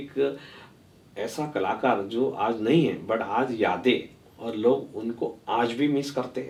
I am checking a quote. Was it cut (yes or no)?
no